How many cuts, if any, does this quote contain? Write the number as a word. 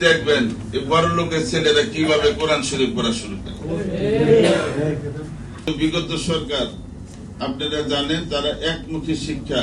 one